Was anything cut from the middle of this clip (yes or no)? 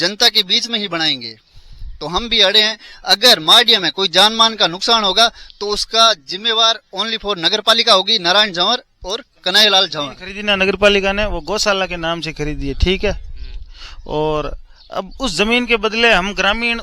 yes